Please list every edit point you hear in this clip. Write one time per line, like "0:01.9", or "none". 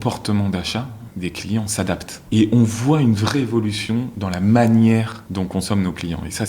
0:02.1
0:05.2